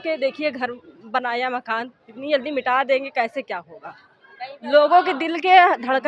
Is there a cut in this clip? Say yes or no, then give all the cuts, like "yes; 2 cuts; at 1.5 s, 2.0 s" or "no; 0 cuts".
no; 0 cuts